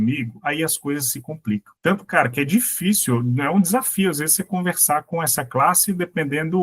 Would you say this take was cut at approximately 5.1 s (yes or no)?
no